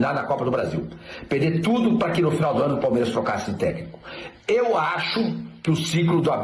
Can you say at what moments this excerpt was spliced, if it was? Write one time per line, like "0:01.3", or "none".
none